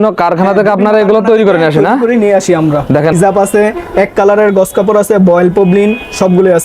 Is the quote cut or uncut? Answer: cut